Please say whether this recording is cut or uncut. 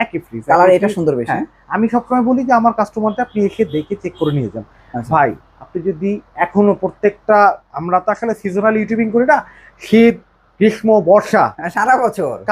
uncut